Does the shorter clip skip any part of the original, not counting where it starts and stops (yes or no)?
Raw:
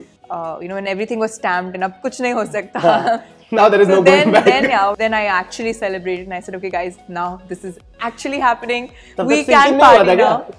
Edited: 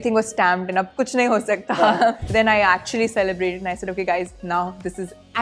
yes